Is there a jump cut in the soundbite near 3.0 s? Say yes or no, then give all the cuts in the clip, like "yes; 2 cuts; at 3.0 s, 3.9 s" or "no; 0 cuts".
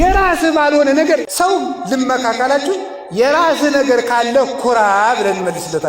no; 1 cut; at 1.2 s